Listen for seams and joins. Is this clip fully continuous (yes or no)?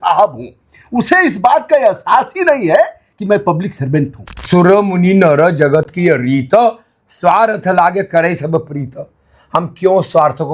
no